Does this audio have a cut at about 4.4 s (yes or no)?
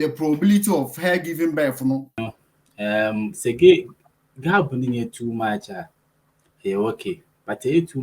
no